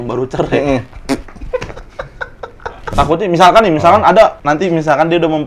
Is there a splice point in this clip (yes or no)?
yes